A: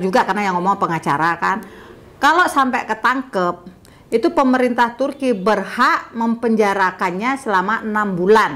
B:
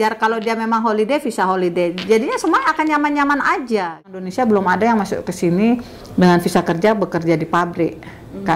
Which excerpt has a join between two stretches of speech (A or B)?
B